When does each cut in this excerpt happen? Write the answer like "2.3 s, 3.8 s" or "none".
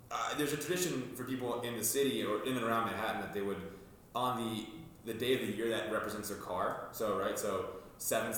none